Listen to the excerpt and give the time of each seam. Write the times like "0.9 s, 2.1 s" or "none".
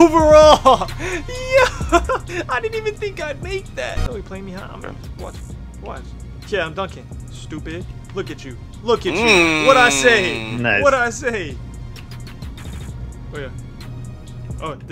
2.3 s, 4.0 s, 11.6 s

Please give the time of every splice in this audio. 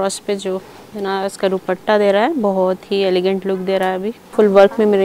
4.1 s

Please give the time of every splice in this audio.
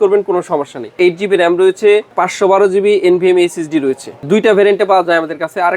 1.0 s, 2.1 s, 4.2 s

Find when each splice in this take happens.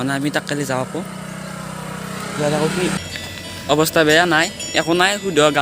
3.0 s

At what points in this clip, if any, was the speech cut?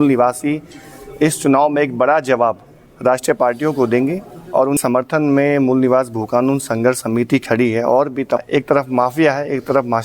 4.8 s, 8.4 s

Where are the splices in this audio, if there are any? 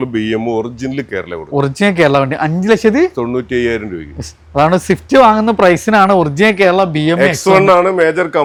none

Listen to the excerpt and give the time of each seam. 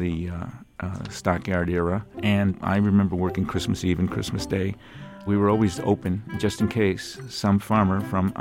2.5 s, 5.2 s

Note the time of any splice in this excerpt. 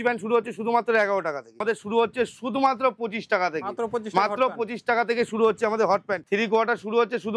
1.6 s, 6.2 s

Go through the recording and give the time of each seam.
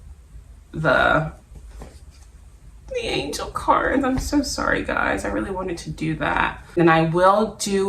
6.8 s

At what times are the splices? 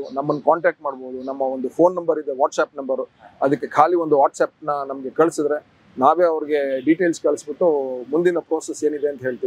none

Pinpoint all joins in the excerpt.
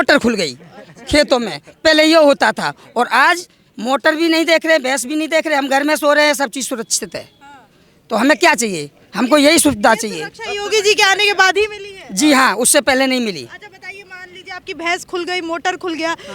none

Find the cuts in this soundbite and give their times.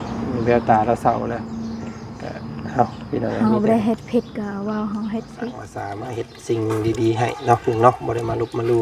6.0 s

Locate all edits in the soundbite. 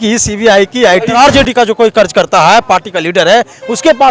1.1 s

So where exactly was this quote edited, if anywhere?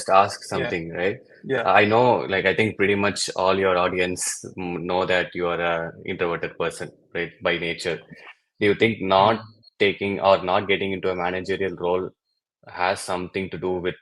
none

